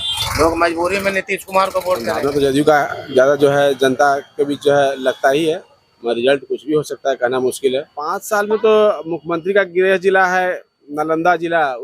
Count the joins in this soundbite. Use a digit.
2